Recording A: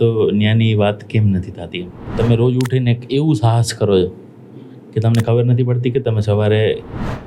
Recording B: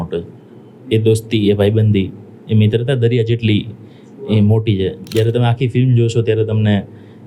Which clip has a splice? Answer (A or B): A